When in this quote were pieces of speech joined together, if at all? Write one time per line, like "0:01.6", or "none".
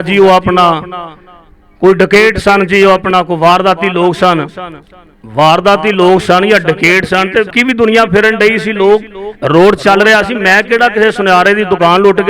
0:07.5